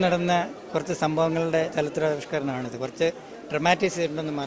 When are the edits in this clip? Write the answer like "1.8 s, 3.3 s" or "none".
none